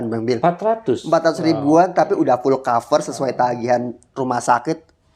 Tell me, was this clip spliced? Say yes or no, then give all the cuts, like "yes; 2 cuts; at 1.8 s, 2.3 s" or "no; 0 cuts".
no; 0 cuts